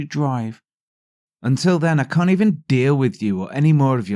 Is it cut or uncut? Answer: cut